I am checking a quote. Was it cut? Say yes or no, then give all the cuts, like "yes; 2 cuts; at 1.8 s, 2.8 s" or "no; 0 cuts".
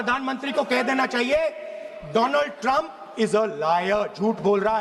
no; 0 cuts